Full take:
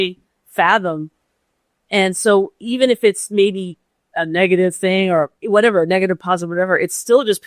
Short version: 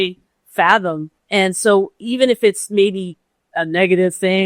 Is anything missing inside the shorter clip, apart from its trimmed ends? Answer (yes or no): yes